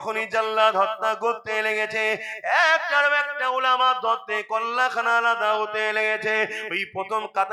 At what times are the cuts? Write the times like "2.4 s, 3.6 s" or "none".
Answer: none